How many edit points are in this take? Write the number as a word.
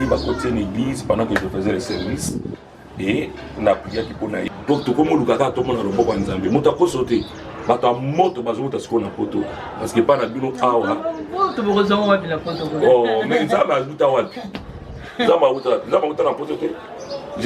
one